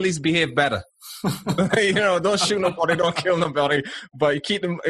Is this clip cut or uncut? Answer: uncut